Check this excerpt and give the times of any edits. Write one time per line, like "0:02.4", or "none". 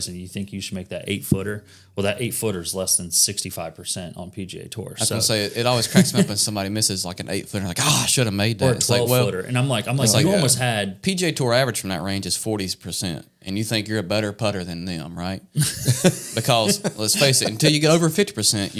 none

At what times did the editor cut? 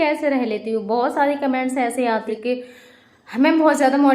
0:02.3

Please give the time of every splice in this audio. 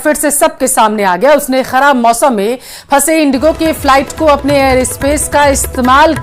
none

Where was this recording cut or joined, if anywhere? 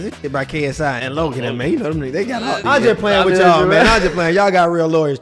0:01.0
0:02.6

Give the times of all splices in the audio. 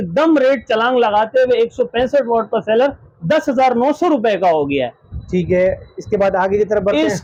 none

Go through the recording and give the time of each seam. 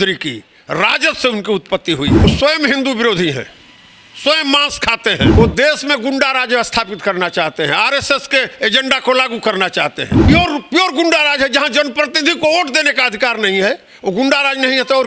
0:02.2
0:05.3
0:10.1

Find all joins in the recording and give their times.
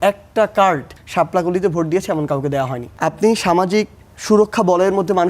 0:01.0
0:02.8

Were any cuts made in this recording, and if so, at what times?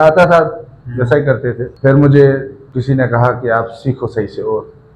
0:01.7
0:02.6

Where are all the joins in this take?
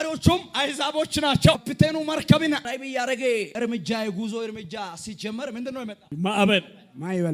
0:01.7
0:02.6
0:03.5
0:06.0

